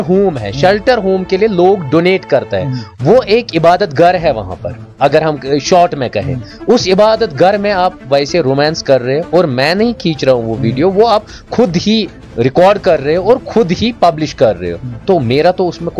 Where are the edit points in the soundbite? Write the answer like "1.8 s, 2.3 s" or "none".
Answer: none